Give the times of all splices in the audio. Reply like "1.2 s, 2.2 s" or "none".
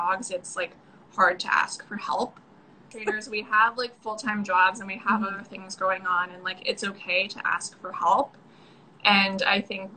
2.9 s